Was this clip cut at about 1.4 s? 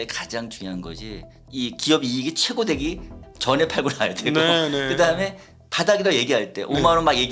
yes; 1 cut; at 1.4 s

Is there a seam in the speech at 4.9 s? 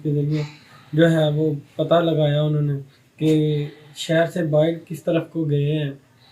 no; 0 cuts

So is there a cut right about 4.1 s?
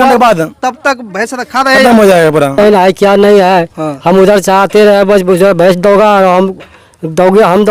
no; 1 cut; at 2.6 s

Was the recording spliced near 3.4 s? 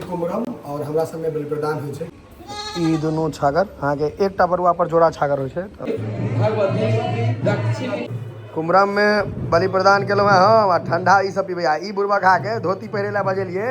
no; 3 cuts; at 2.2 s, 5.9 s, 8.1 s

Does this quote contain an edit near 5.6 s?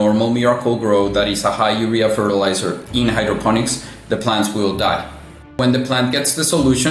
yes; 1 cut; at 5.6 s

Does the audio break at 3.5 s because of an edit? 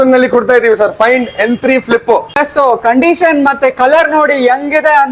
no; 1 cut; at 2.3 s

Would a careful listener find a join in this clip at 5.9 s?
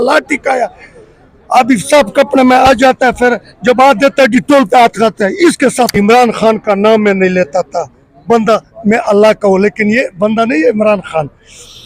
yes; 1 cut; at 5.9 s

